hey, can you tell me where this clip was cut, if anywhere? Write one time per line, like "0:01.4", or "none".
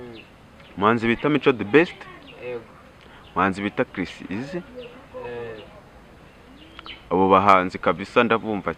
none